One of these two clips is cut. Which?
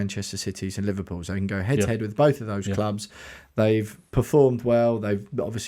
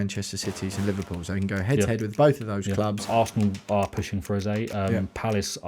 second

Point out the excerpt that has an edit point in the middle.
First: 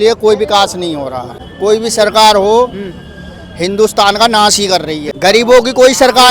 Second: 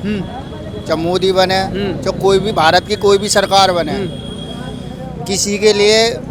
first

